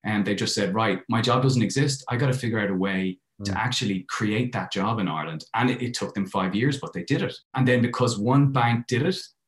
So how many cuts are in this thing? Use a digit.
1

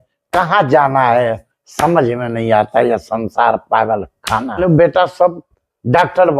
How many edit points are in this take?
1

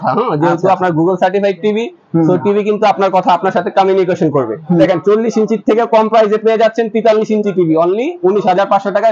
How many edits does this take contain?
1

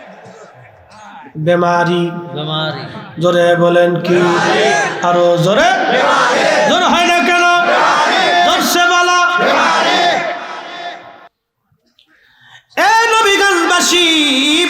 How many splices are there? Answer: 1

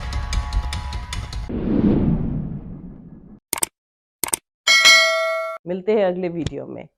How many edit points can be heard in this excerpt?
0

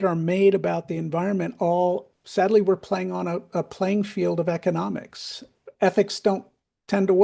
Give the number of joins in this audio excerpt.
2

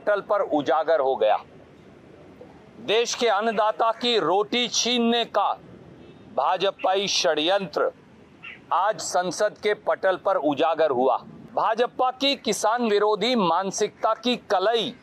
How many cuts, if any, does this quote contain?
1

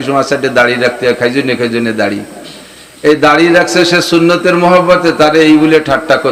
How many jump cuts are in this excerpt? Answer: 0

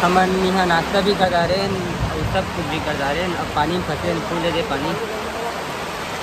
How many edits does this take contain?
0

